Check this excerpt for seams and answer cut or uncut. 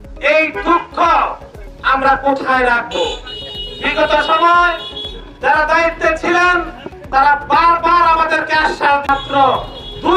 cut